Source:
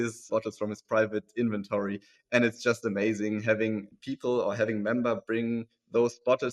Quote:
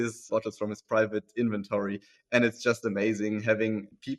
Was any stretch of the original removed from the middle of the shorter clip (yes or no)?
no